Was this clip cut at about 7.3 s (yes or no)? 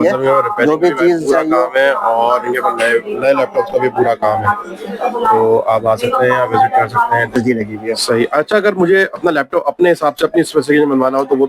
yes